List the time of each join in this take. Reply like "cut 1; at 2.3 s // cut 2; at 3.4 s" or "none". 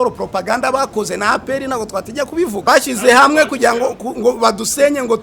cut 1; at 2.6 s

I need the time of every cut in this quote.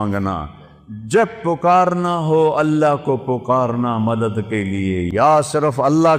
cut 1; at 5.0 s

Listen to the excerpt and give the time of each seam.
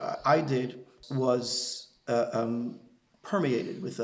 cut 1; at 0.9 s

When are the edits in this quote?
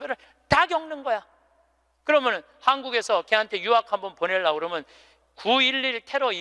none

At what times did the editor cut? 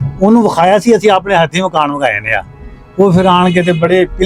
none

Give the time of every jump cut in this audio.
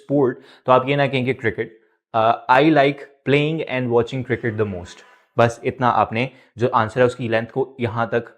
none

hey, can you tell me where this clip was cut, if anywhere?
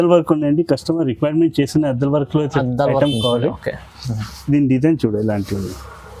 none

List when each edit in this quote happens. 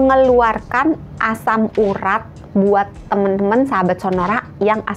none

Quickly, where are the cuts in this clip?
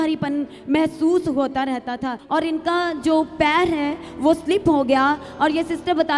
cut 1; at 2.1 s

